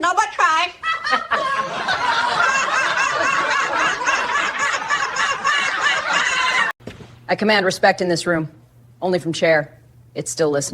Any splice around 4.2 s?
no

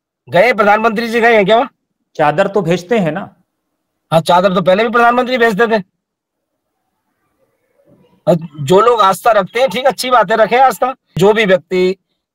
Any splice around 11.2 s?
yes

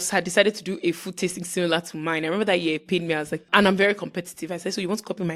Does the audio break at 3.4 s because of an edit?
yes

